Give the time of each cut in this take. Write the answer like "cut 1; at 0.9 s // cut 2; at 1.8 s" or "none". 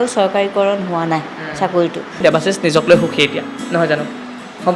cut 1; at 2.2 s